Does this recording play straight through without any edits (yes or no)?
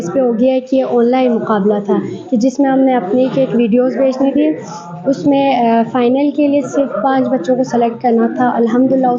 yes